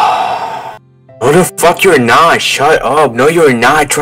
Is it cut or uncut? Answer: cut